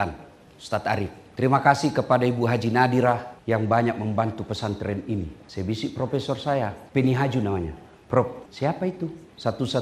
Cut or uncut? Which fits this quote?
cut